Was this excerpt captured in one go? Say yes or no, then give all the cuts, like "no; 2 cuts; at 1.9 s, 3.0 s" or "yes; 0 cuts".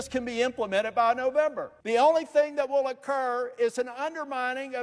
no; 1 cut; at 1.8 s